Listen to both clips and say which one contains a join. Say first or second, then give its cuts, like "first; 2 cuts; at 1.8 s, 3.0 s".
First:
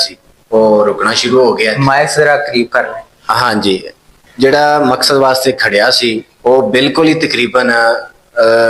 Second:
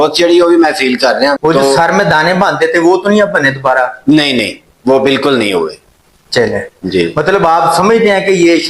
second; 1 cut; at 1.4 s